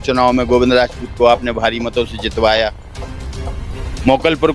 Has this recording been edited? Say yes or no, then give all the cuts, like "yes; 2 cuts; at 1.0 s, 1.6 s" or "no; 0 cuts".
no; 0 cuts